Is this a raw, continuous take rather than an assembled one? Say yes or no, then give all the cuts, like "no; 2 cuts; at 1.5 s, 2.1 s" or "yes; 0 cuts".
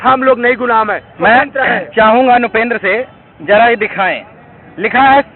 yes; 0 cuts